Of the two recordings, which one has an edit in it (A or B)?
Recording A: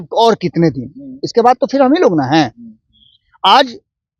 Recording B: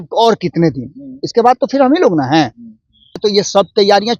B